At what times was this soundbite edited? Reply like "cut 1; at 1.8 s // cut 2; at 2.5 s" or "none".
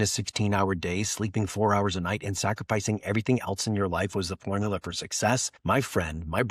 cut 1; at 5.5 s